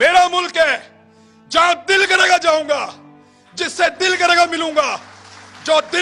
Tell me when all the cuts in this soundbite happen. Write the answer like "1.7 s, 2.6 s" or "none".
none